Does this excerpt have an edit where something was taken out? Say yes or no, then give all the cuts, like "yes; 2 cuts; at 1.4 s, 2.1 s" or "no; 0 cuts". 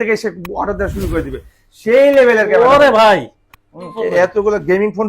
yes; 1 cut; at 3.9 s